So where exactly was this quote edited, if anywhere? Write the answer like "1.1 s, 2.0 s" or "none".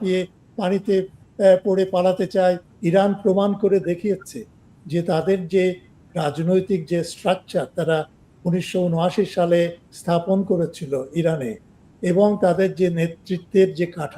2.7 s